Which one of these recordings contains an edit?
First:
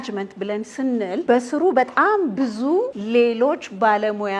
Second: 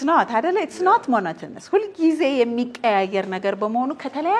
first; 2 cuts; at 1.2 s, 3.0 s

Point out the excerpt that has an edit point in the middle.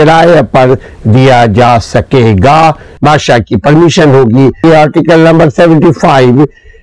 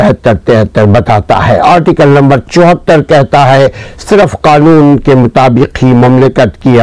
first; 2 cuts; at 2.9 s, 4.6 s

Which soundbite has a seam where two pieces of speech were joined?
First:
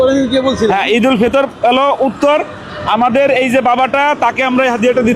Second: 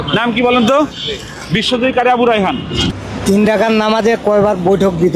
second; 1 cut; at 2.9 s

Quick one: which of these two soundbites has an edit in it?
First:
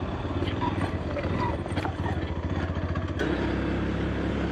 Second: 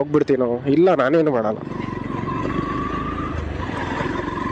first; 1 cut; at 3.2 s

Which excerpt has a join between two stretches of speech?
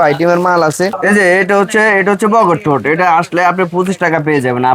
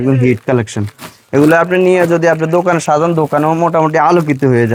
first; 1 cut; at 1.0 s

